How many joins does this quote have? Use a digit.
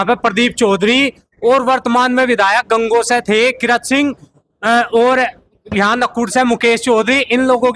0